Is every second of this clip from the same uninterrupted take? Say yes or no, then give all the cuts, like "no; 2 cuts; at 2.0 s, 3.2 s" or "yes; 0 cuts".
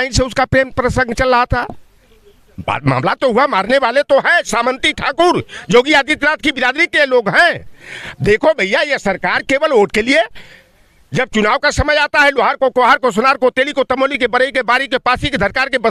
yes; 0 cuts